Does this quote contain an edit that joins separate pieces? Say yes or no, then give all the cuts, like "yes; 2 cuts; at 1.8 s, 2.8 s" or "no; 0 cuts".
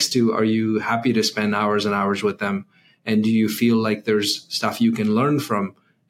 no; 0 cuts